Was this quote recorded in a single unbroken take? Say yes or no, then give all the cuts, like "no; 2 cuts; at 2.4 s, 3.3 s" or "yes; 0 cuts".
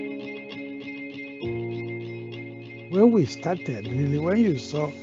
no; 2 cuts; at 1.3 s, 4.0 s